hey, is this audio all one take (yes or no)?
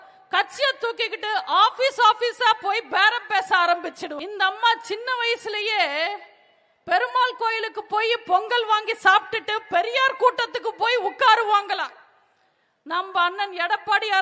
no